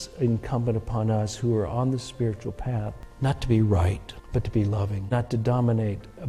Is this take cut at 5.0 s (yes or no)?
yes